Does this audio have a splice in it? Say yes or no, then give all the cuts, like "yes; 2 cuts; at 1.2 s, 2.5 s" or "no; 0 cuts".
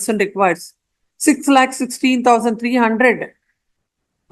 no; 0 cuts